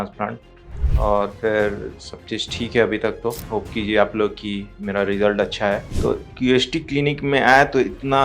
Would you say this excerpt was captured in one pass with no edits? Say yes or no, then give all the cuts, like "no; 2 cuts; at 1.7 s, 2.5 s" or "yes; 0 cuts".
no; 1 cut; at 5.9 s